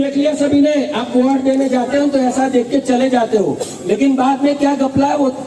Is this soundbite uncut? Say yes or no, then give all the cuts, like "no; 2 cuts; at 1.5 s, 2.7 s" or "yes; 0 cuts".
yes; 0 cuts